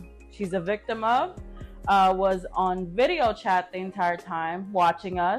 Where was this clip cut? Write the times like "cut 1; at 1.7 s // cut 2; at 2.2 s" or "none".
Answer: none